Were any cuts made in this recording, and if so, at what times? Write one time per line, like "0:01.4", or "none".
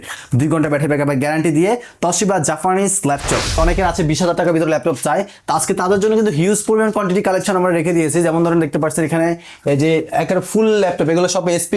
0:03.6

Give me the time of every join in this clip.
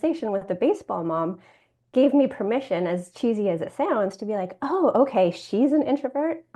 none

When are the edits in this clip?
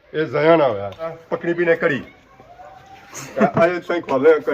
0:01.2

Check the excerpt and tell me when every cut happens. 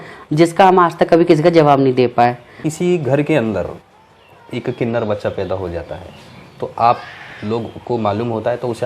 0:02.6

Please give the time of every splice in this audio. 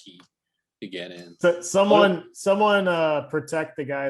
0:01.3

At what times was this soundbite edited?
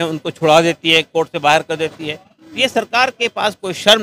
none

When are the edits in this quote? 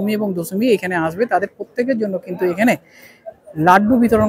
none

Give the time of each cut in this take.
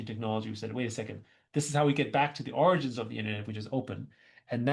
none

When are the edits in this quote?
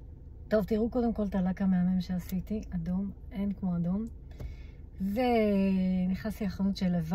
none

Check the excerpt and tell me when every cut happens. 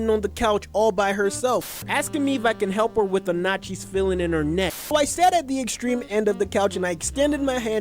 0:01.7
0:04.9

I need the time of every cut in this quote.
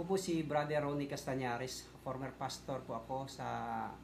none

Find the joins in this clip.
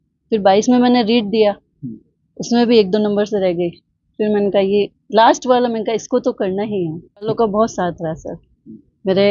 0:07.3

